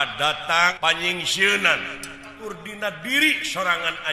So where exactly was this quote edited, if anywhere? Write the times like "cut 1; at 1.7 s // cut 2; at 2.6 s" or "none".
cut 1; at 0.7 s // cut 2; at 2.4 s